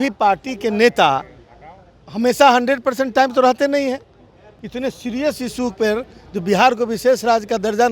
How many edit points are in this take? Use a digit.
1